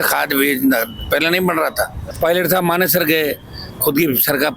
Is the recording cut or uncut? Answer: cut